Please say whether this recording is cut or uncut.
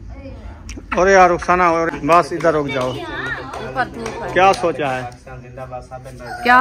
cut